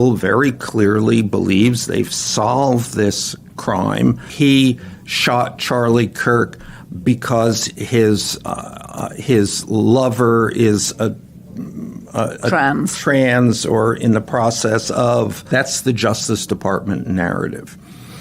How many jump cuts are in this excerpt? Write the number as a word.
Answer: two